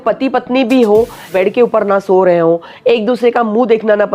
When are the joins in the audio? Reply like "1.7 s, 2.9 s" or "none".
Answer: 1.3 s